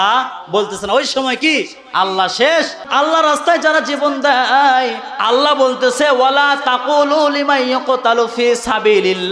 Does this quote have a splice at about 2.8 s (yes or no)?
yes